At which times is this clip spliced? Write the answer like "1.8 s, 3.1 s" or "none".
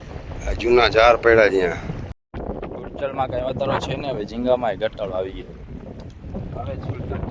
2.2 s